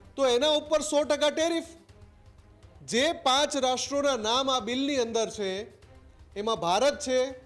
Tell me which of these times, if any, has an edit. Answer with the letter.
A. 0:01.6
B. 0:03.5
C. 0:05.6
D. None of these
D